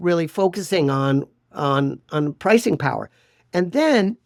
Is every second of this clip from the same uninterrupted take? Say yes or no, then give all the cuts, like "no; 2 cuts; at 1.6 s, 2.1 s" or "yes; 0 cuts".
yes; 0 cuts